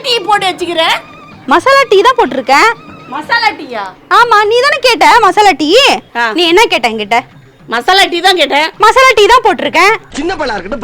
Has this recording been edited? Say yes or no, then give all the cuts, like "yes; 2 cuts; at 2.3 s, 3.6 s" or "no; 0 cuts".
yes; 1 cut; at 6.1 s